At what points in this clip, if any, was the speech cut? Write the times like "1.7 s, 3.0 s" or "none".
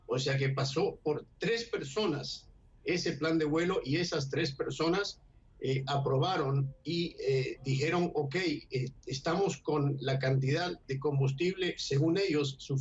1.6 s